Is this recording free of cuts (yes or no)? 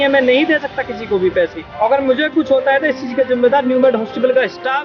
no